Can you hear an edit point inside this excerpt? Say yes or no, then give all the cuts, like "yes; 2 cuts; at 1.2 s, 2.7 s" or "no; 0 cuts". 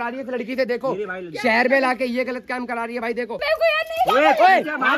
yes; 1 cut; at 3.3 s